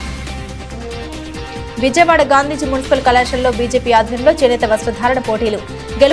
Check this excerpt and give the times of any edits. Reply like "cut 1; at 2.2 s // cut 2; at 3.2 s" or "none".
cut 1; at 1.5 s